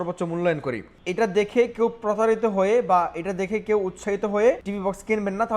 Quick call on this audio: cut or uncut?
cut